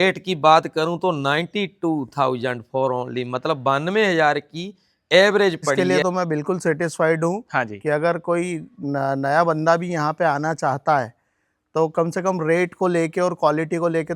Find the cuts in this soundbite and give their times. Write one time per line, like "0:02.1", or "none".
0:05.8